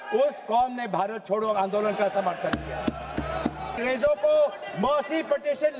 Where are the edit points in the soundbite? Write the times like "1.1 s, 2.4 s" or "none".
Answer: 3.7 s